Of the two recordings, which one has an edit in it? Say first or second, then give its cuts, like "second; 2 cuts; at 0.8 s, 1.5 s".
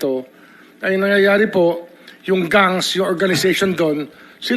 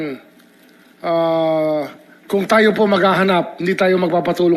first; 1 cut; at 1.4 s